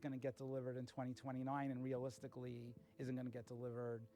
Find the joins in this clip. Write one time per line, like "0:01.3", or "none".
none